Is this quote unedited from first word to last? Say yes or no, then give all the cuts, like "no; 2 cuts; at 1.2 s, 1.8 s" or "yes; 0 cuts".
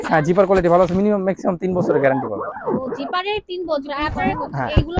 yes; 0 cuts